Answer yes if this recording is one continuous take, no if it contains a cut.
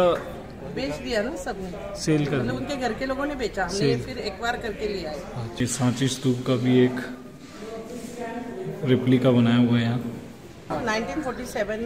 no